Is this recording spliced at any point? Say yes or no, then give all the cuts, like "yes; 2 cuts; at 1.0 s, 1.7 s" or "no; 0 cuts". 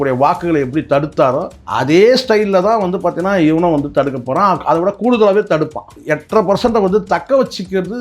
yes; 2 cuts; at 1.6 s, 5.9 s